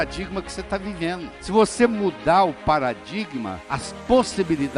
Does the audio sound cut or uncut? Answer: uncut